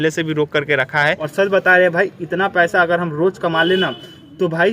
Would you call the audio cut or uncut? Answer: cut